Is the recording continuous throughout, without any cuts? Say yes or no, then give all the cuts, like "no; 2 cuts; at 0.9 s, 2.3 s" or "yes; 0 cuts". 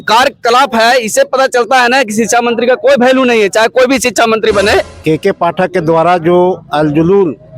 no; 1 cut; at 4.9 s